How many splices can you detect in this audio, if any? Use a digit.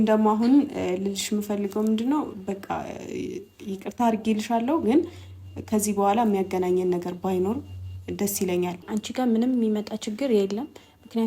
1